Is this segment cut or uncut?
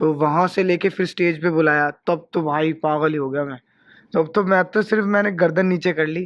uncut